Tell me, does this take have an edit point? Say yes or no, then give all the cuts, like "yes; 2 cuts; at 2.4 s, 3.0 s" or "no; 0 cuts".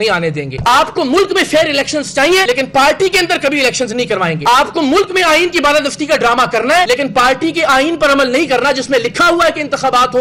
no; 0 cuts